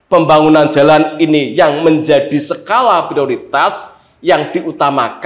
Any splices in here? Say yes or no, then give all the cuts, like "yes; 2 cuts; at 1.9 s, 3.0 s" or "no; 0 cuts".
no; 0 cuts